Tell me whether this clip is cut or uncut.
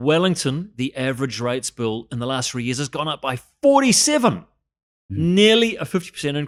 uncut